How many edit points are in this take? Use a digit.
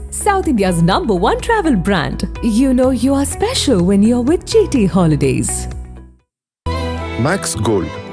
1